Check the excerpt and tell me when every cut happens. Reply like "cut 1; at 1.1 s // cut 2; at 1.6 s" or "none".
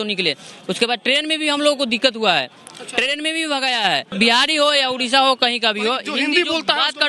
cut 1; at 4.1 s